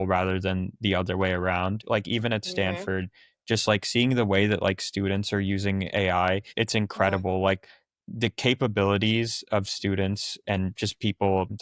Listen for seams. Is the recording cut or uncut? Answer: cut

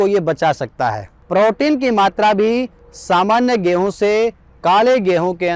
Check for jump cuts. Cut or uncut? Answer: cut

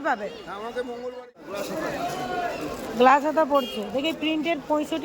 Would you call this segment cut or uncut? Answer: cut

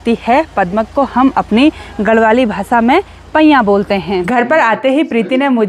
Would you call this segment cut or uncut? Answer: cut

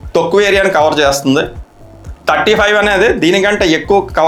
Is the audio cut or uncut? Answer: uncut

